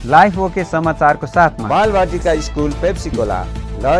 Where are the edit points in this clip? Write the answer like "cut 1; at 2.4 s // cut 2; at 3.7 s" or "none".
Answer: cut 1; at 1.6 s